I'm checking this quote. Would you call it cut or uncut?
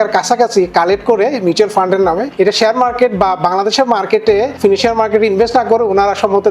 cut